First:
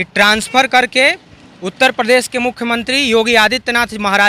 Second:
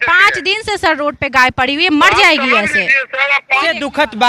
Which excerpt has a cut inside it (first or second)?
second